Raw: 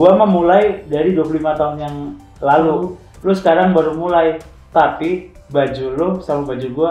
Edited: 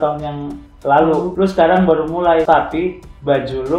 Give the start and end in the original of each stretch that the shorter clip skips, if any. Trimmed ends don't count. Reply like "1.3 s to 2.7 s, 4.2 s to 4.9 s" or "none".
2.9 s to 3.2 s, 4.3 s to 4.7 s